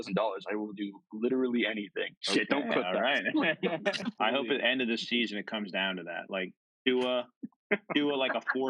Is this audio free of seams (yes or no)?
no